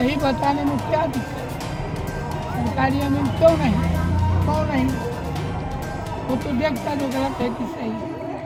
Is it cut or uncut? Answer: uncut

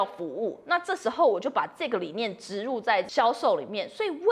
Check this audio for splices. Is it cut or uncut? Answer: cut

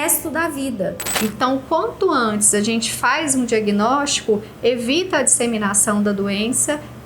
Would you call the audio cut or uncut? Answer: cut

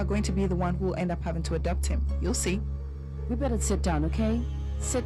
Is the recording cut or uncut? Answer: uncut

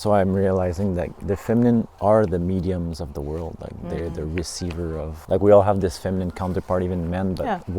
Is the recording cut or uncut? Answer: cut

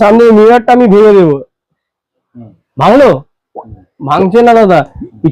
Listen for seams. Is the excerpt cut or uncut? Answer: uncut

